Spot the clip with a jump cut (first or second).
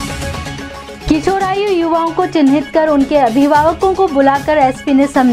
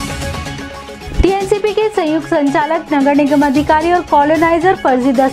second